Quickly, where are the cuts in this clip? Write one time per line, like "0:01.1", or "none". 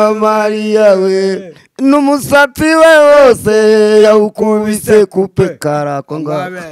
none